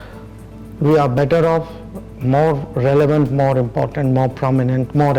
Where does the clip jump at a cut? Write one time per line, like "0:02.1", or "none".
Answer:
none